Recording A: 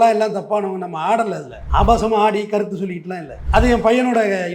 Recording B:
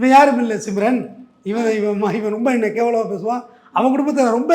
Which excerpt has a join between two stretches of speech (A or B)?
A